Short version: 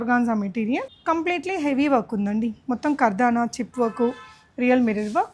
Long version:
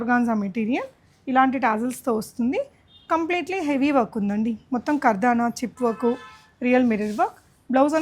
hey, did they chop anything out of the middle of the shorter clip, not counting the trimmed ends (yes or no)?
yes